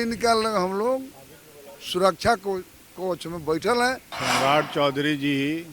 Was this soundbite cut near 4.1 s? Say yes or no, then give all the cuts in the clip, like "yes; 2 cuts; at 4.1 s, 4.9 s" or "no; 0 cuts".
yes; 1 cut; at 4.1 s